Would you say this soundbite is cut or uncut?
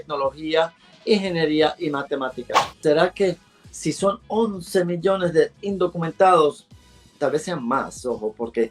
cut